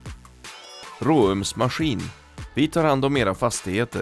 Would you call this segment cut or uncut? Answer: cut